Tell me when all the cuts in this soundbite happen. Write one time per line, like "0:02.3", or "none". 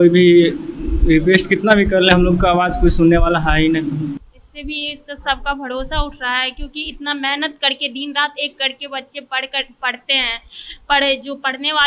0:04.3